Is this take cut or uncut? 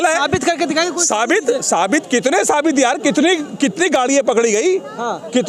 uncut